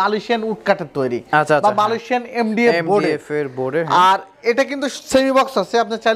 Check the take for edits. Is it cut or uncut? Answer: uncut